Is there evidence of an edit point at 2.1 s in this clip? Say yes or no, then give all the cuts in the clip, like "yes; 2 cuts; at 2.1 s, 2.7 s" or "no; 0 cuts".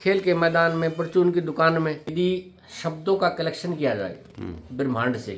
yes; 1 cut; at 2.1 s